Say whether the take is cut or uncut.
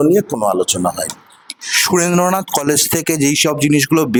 uncut